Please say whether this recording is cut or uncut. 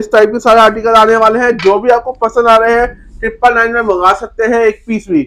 uncut